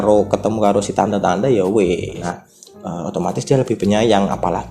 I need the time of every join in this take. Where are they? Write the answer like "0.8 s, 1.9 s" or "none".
2.3 s